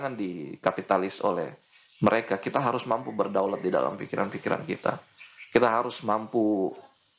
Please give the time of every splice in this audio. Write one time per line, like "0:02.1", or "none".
none